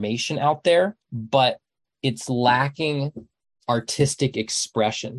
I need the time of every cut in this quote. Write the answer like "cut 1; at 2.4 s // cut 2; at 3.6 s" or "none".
none